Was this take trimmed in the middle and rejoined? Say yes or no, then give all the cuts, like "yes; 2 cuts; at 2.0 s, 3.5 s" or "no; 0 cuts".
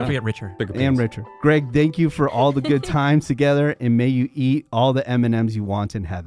yes; 1 cut; at 1.2 s